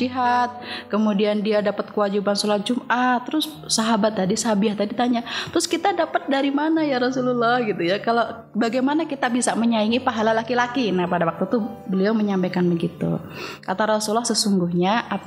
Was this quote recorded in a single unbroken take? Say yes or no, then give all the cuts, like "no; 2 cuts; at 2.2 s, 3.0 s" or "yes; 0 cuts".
yes; 0 cuts